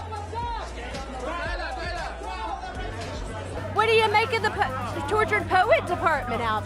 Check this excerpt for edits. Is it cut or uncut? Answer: uncut